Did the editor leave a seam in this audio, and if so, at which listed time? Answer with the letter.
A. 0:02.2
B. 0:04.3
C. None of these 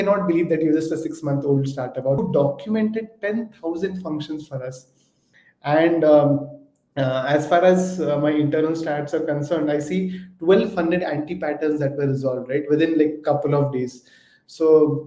A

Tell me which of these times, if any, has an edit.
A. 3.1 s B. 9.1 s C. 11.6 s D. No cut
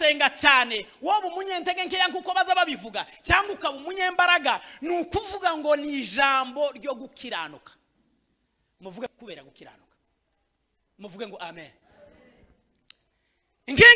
B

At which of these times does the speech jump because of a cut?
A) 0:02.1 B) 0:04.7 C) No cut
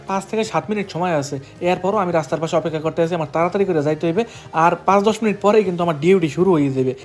C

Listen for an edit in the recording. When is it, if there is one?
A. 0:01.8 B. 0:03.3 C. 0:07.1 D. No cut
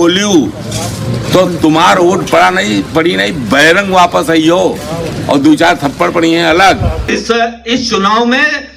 C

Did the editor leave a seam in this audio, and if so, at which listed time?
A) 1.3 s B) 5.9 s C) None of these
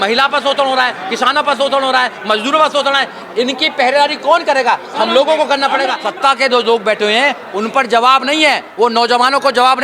B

